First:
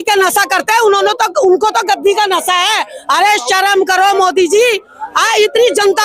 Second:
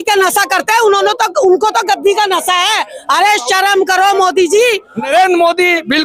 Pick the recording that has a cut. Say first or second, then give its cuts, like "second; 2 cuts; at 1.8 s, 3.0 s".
second; 1 cut; at 5.0 s